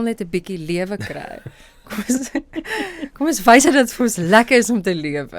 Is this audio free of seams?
yes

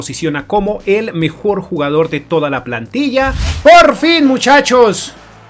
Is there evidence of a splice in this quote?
yes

